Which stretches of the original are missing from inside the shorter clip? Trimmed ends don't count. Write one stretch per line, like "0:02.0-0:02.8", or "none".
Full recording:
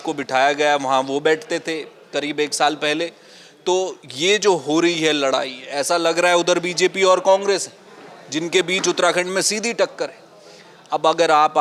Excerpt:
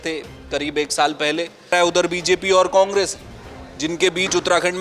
0:03.3-0:06.2